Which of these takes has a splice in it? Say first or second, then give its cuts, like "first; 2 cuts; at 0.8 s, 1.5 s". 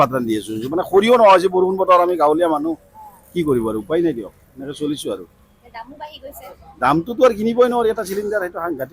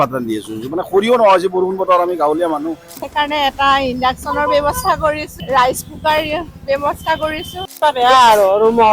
second; 2 cuts; at 3.1 s, 7.8 s